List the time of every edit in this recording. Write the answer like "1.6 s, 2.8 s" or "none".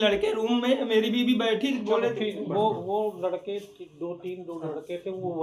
none